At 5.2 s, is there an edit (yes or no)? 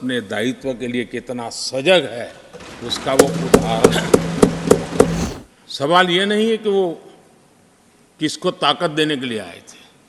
yes